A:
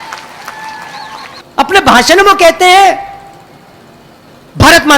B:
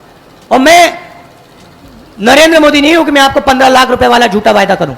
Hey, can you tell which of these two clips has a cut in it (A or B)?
A